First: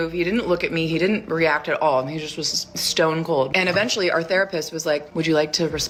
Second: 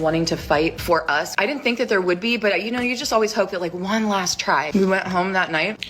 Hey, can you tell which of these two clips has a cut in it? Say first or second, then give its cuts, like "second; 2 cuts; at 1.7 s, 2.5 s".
second; 1 cut; at 4.9 s